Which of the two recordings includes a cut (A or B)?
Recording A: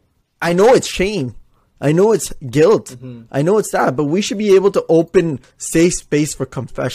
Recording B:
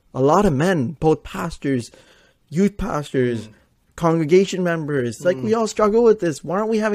A